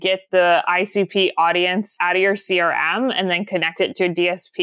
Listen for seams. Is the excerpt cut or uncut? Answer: cut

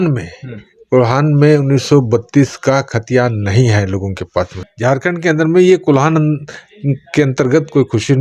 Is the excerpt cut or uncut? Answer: cut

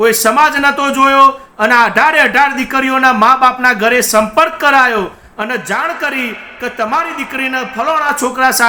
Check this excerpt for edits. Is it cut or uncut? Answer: uncut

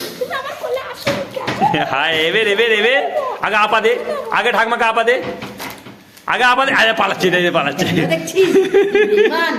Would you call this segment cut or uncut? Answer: uncut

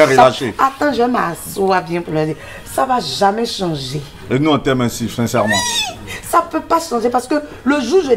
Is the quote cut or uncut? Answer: uncut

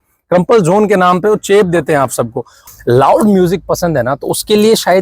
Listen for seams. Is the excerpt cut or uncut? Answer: cut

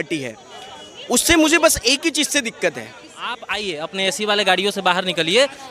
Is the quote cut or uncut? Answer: cut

